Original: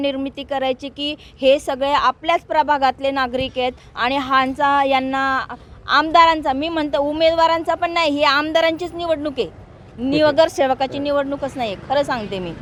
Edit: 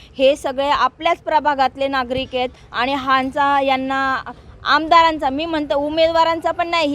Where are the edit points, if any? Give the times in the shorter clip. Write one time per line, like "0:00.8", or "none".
none